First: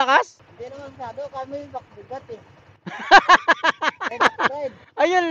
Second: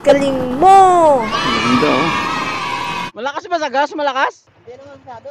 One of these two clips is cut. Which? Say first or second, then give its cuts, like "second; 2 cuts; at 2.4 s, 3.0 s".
second; 1 cut; at 3.1 s